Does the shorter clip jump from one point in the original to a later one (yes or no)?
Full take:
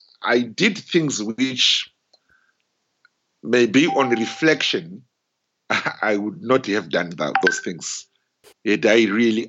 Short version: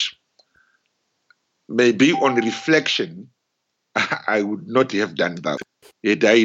yes